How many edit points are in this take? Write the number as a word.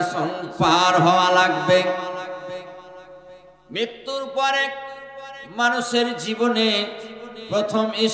zero